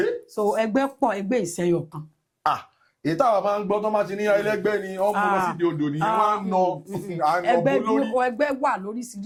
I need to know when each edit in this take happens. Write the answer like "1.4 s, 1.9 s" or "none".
none